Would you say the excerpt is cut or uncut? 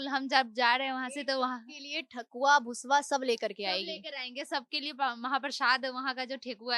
uncut